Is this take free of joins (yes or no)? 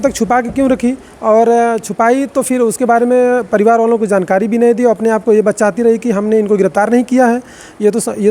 yes